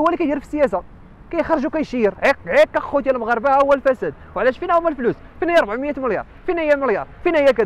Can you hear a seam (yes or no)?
yes